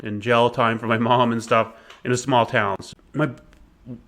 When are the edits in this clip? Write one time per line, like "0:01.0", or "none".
0:02.8